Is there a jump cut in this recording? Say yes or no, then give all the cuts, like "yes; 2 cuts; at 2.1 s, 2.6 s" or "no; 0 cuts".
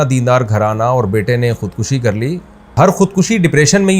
yes; 1 cut; at 2.7 s